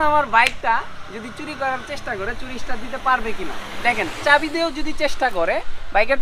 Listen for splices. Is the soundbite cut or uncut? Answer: uncut